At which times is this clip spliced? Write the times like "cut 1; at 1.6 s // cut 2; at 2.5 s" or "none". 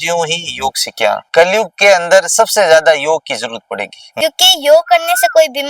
cut 1; at 1.2 s // cut 2; at 4.1 s